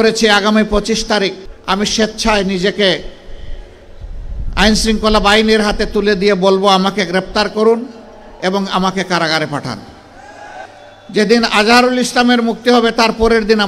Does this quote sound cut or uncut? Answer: cut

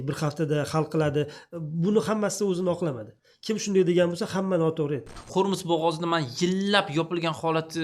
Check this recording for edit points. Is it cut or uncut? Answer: cut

